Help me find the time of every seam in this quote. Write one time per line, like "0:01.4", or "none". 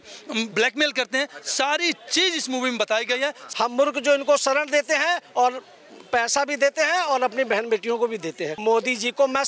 0:03.4
0:08.5